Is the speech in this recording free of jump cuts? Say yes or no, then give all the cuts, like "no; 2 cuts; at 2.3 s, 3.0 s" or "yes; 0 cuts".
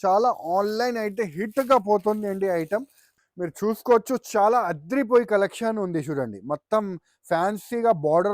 no; 1 cut; at 3.0 s